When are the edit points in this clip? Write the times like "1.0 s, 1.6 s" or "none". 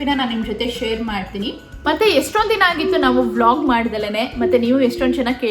1.8 s